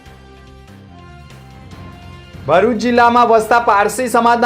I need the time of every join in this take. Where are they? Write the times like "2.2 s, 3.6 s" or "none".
1.4 s

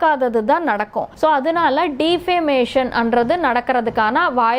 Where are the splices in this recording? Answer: 1.0 s

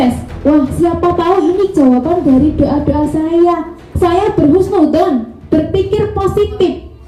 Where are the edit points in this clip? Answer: none

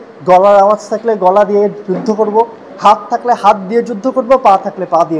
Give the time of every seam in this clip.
none

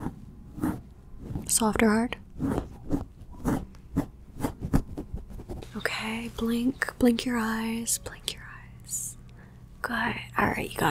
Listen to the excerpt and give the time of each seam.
5.5 s

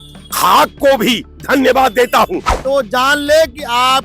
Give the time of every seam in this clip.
2.5 s

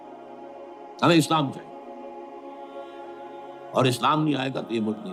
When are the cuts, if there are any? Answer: none

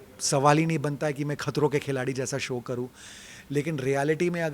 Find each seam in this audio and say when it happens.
none

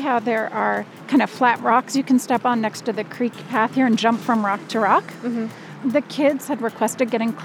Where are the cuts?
0.9 s, 5.7 s

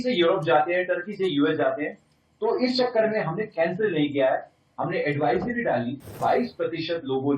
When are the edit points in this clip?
6.2 s

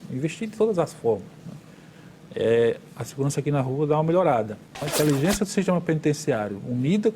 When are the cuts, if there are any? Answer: 4.9 s

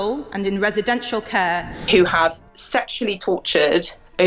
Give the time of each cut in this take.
1.7 s

